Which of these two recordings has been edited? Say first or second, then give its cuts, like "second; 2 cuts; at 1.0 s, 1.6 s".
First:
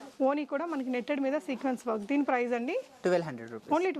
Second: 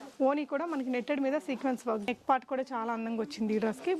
second; 1 cut; at 2.1 s